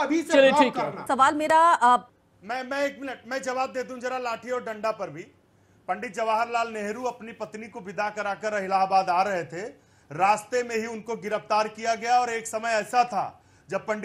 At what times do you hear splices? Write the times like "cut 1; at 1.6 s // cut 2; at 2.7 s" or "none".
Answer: cut 1; at 2.1 s